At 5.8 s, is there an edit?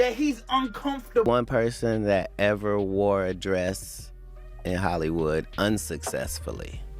no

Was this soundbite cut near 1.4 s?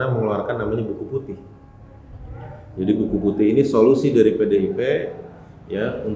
no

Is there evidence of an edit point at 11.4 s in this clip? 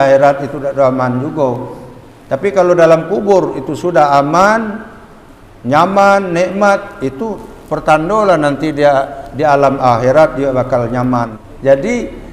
yes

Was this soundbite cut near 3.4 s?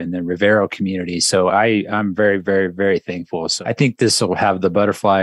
yes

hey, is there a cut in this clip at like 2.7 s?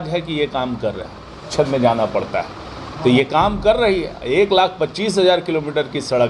no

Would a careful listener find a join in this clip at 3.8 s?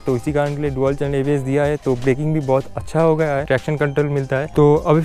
yes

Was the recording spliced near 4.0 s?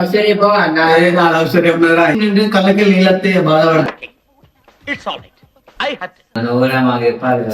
no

